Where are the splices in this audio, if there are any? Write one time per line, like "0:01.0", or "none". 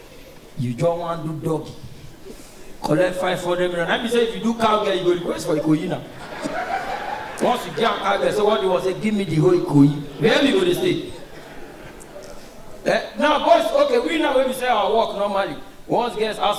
none